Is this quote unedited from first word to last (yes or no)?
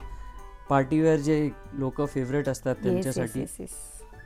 yes